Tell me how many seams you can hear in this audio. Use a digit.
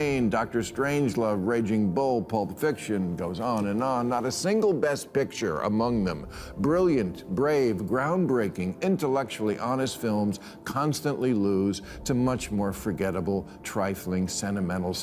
0